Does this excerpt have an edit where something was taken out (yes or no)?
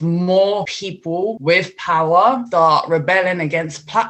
yes